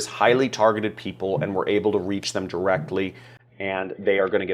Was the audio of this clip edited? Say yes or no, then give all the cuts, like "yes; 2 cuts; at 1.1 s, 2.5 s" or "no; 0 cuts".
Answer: no; 0 cuts